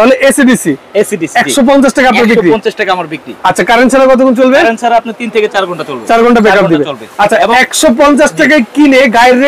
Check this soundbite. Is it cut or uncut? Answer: uncut